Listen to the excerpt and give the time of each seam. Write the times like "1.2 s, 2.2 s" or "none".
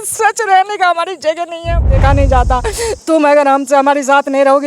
1.9 s